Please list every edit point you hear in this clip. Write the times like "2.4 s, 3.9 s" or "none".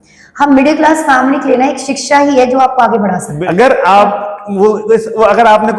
3.3 s